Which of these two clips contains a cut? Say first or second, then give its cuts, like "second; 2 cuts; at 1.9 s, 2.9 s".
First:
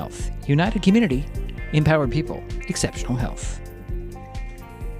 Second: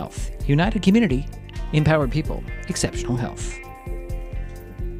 first; 1 cut; at 3.3 s